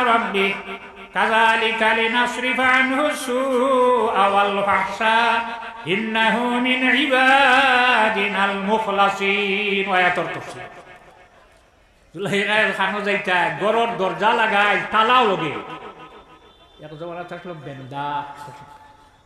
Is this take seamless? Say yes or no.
yes